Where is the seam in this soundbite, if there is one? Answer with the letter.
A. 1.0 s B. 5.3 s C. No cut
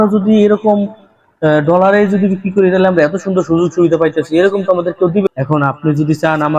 B